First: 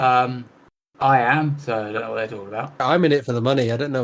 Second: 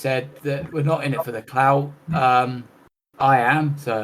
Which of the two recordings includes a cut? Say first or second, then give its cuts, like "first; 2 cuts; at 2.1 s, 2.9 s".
first; 1 cut; at 2.8 s